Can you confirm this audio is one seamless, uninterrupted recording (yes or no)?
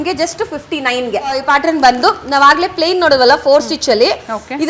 no